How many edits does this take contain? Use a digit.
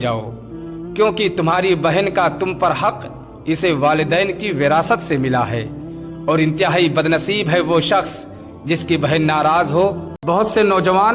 0